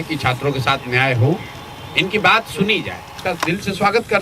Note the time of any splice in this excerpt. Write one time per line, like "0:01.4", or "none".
0:03.2